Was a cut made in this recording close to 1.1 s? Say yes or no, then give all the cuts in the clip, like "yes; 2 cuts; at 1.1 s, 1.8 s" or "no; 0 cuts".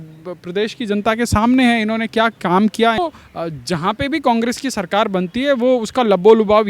no; 1 cut; at 3.0 s